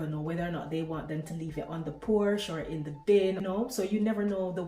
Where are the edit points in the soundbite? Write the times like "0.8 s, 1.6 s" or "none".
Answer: 3.4 s